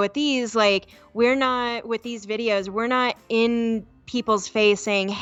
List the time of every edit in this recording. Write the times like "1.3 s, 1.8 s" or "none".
none